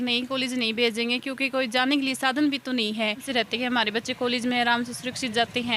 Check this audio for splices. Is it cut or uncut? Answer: cut